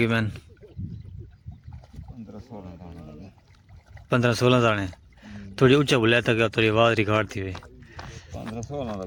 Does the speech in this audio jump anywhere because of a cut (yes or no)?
no